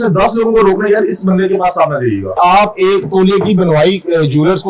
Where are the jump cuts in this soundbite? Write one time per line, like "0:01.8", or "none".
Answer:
0:02.4